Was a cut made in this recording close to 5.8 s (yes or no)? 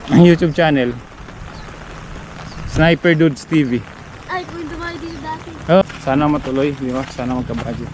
yes